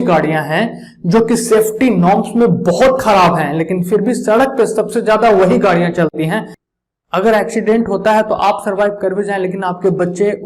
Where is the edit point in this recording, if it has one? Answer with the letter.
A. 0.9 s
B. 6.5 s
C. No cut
B